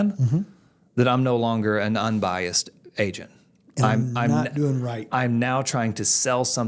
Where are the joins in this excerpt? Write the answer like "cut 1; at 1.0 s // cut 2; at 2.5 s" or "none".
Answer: none